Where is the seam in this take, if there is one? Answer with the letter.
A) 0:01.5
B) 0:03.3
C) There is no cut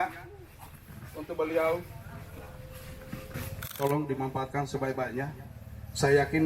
B